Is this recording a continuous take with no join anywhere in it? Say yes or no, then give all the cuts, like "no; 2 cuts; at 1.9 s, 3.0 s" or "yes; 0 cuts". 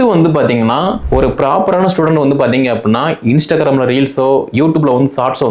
no; 1 cut; at 1.0 s